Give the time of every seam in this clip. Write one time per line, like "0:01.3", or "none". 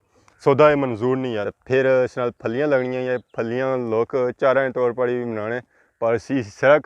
0:01.5

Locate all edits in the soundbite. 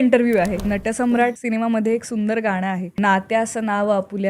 0:01.1
0:02.9

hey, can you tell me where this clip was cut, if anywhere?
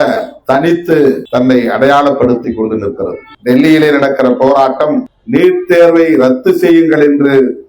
0:01.2
0:03.3
0:05.1

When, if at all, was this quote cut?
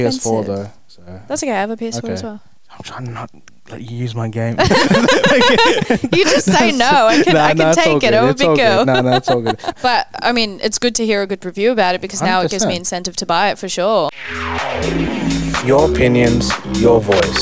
0:14.1

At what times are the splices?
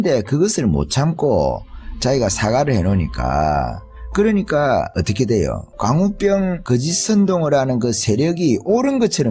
0:04.9
0:05.7
0:06.6

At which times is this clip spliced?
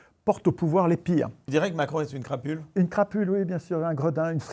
0:01.4

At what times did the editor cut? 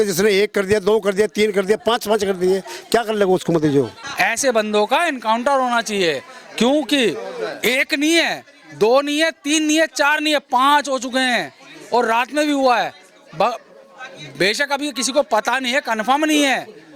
0:04.0

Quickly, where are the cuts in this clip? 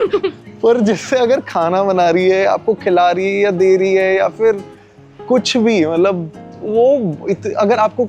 none

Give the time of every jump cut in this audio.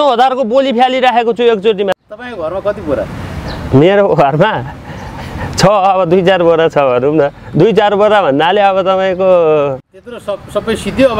0:02.0
0:09.9

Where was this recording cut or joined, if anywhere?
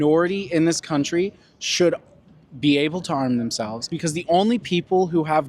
0:03.9

